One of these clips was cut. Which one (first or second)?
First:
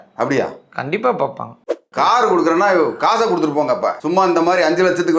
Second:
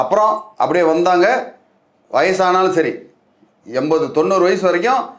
first